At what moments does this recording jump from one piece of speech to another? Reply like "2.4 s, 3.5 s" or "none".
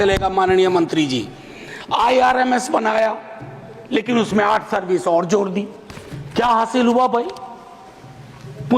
none